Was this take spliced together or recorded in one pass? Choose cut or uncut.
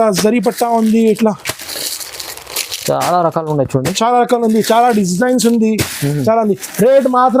uncut